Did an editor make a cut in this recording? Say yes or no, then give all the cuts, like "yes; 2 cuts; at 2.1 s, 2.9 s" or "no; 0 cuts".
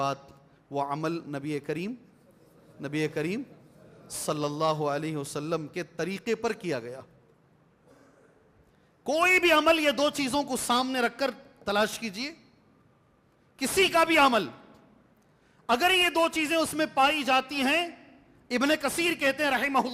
no; 0 cuts